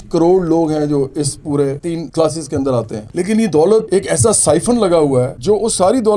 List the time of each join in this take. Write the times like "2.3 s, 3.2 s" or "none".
3.0 s

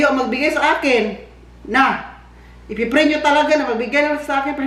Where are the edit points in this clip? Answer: none

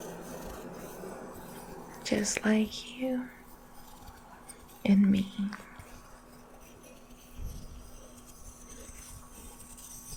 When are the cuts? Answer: none

